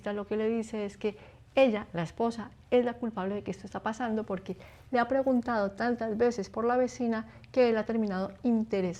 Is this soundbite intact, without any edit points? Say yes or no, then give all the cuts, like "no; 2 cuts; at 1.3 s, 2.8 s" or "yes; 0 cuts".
yes; 0 cuts